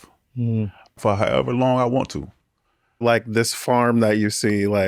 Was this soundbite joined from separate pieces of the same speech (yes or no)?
yes